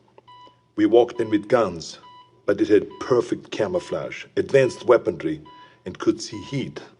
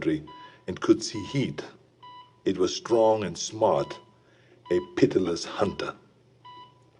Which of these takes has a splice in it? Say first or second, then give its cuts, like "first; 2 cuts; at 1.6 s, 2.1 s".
first; 1 cut; at 1.0 s